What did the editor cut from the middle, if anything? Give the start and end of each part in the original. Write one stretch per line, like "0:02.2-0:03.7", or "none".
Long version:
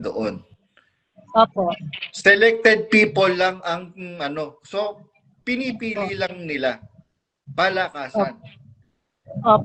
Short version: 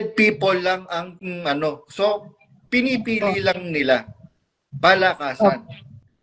none